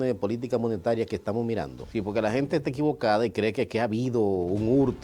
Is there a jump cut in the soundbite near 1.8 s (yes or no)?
yes